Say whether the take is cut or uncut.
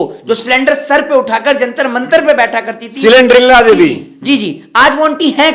uncut